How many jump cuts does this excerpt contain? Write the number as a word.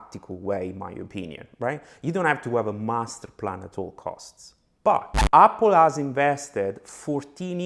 one